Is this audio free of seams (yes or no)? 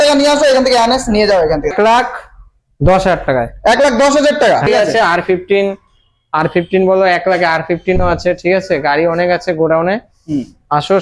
no